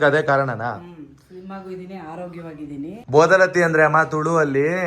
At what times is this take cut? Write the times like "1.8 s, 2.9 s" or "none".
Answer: 3.0 s